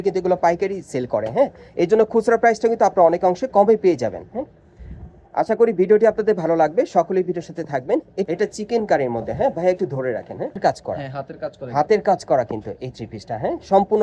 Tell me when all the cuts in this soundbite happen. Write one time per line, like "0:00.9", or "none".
0:08.2
0:10.6